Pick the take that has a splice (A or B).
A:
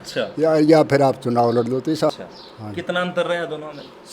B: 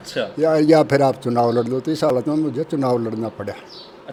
A